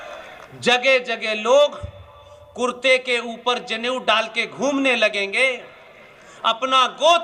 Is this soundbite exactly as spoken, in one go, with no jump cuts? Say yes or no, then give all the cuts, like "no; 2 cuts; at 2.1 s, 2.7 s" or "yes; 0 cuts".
yes; 0 cuts